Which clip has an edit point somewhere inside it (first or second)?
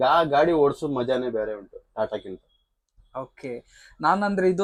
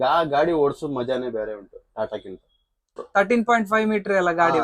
second